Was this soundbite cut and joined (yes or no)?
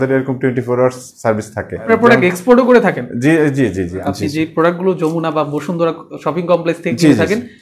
yes